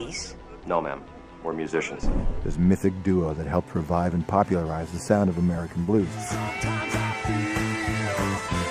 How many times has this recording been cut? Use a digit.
1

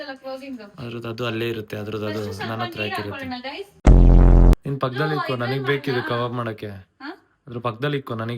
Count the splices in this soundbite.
1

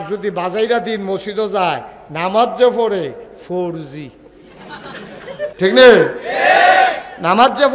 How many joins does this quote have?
1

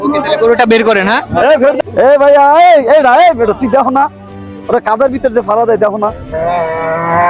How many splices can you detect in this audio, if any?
1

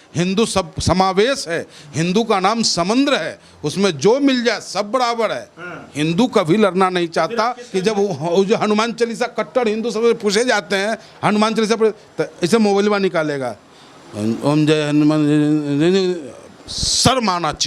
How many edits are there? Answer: 1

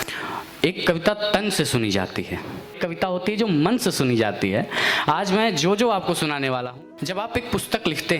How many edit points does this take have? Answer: 2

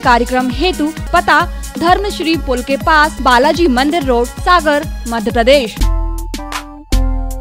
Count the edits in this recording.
4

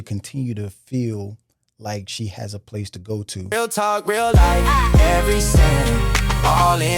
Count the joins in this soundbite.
1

